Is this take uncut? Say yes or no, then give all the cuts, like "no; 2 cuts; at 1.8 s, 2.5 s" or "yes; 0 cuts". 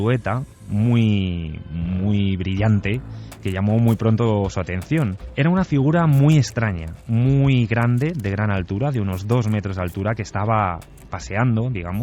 no; 1 cut; at 5.2 s